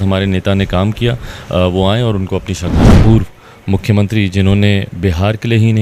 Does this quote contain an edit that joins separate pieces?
yes; 1 cut; at 2.9 s

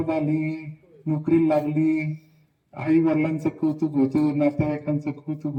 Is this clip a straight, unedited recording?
yes; 0 cuts

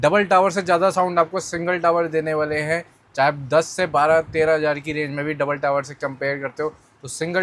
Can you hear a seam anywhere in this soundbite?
no; 0 cuts

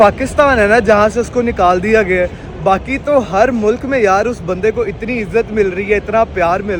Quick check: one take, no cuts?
yes; 0 cuts

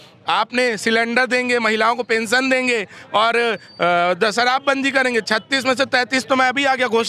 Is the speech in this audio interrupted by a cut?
no; 0 cuts

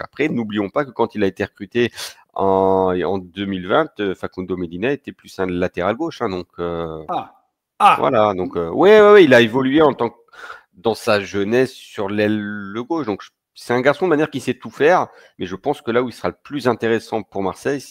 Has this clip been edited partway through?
no; 0 cuts

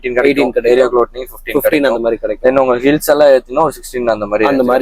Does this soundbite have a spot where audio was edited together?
no; 0 cuts

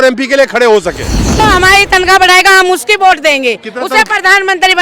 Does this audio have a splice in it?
yes; 1 cut; at 1.4 s

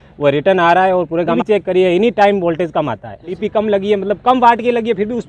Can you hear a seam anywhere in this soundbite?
yes; 2 cuts; at 1.3 s, 3.4 s

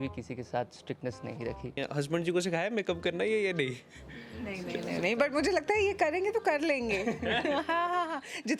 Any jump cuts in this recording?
yes; 1 cut; at 1.8 s

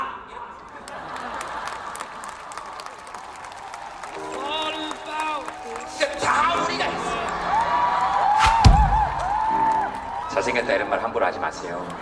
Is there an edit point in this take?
yes; 1 cut; at 4.1 s

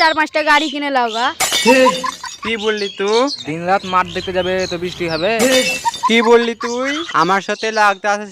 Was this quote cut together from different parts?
yes; 2 cuts; at 3.4 s, 7.1 s

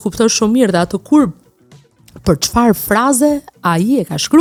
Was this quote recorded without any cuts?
yes; 0 cuts

